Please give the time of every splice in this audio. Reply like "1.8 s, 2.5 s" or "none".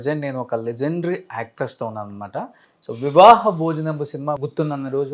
none